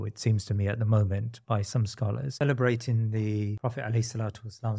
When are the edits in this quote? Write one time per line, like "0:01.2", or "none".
0:02.4
0:03.6

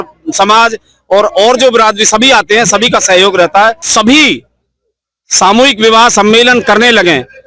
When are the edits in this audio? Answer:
0:03.8

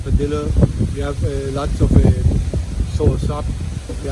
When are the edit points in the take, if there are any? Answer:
none

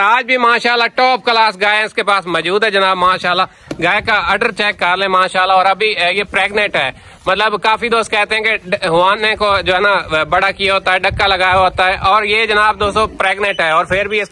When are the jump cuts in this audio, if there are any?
none

